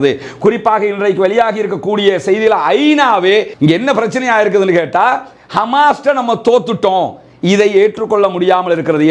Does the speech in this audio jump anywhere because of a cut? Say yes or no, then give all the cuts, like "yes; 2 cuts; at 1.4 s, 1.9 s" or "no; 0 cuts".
yes; 1 cut; at 3.5 s